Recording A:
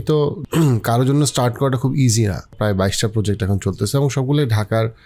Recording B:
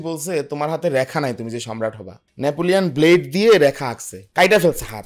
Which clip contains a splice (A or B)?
A